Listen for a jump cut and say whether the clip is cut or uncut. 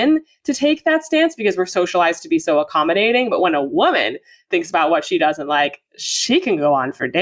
uncut